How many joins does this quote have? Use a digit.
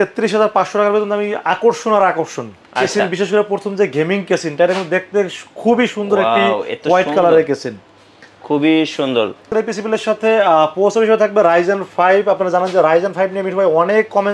1